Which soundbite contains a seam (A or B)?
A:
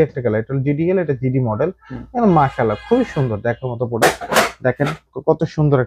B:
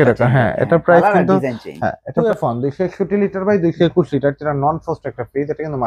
B